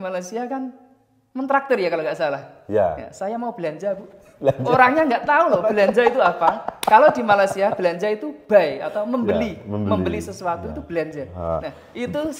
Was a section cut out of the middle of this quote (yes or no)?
no